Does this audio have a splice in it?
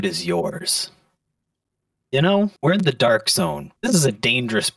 yes; 2 cuts; at 2.6 s, 3.7 s

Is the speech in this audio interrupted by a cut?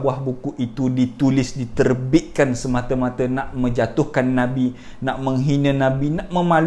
no; 0 cuts

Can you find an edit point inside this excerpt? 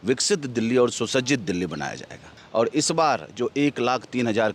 yes; 1 cut; at 2.4 s

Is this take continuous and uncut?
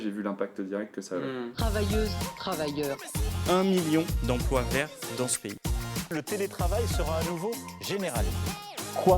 no; 1 cut; at 1.5 s

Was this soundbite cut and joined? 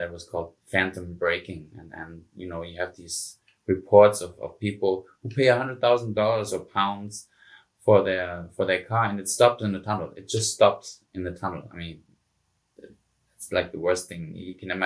no; 0 cuts

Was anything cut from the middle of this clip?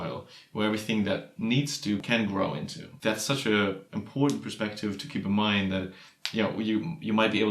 yes; 3 cuts; at 2.0 s, 2.9 s, 3.9 s

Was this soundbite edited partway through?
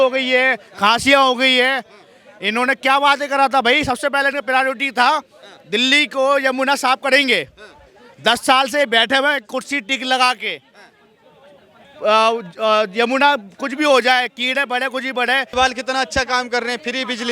no; 0 cuts

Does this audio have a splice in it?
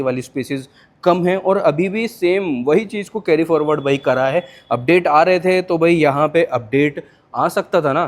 no; 0 cuts

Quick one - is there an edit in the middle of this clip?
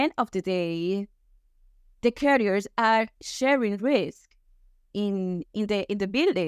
no; 0 cuts

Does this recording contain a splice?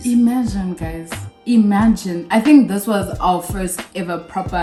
no; 0 cuts

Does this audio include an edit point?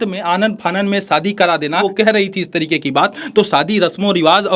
yes; 1 cut; at 1.8 s

